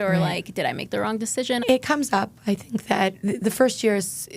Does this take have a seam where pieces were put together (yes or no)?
yes